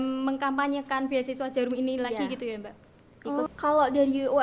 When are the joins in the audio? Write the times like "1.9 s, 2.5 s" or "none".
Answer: 3.5 s